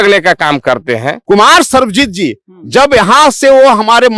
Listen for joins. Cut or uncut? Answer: cut